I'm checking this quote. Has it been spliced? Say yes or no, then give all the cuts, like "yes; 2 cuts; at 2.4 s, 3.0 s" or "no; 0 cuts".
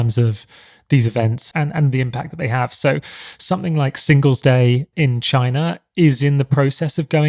no; 0 cuts